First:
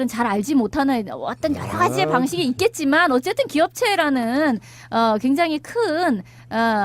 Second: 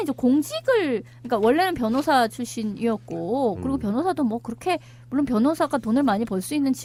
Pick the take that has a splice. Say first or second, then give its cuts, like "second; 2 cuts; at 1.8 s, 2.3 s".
first; 1 cut; at 2.6 s